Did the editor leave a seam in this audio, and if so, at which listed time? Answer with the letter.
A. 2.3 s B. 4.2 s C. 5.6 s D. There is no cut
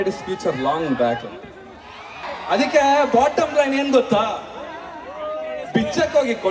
A